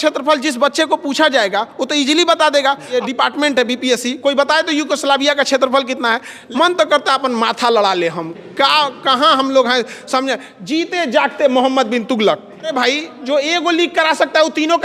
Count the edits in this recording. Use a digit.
3